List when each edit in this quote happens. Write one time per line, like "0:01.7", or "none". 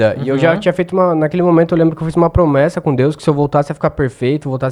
none